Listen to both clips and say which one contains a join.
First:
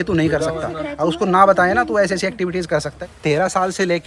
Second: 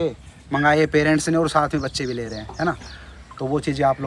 first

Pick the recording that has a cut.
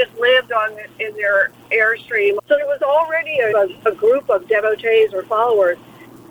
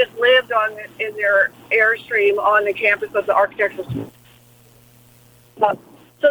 first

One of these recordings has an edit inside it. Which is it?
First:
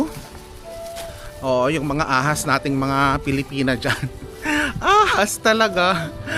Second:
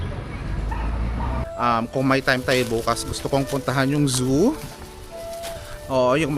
second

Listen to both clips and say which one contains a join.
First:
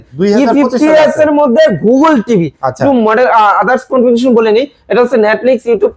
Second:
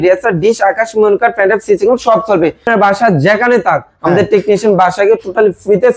second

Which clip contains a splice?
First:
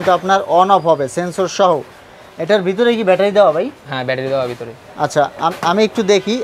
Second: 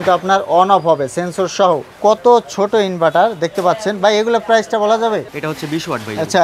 second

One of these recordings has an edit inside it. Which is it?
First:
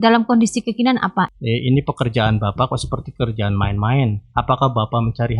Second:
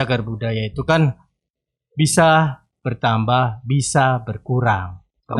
first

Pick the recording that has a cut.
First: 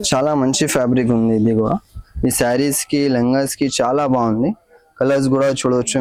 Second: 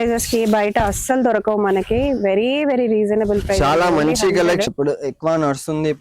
second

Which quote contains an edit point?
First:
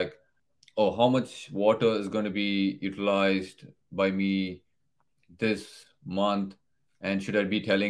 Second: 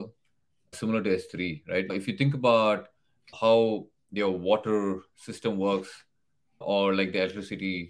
second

